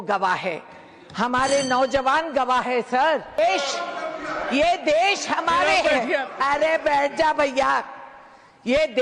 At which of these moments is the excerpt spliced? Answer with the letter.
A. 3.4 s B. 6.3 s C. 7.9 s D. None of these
A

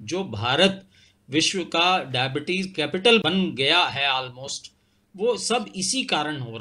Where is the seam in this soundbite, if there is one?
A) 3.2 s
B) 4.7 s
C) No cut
A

